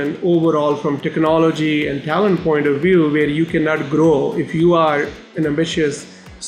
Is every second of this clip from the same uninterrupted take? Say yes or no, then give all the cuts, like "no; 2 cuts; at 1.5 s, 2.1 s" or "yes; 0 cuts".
yes; 0 cuts